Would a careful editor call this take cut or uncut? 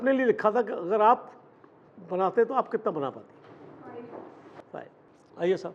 cut